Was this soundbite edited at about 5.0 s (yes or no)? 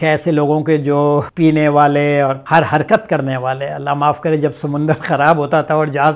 no